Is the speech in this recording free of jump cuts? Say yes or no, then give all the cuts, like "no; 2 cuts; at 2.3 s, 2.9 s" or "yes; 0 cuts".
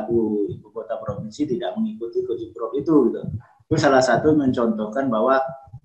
yes; 0 cuts